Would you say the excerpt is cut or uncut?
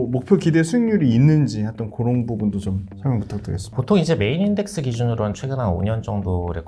cut